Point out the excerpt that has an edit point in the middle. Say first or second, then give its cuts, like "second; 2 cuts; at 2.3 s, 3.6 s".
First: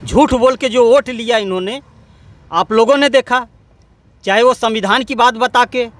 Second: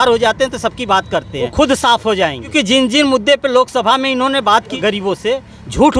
second; 3 cuts; at 1.5 s, 2.5 s, 4.7 s